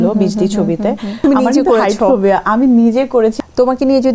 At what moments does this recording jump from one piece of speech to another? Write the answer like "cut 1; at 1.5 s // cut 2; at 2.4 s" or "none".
cut 1; at 1.2 s // cut 2; at 3.3 s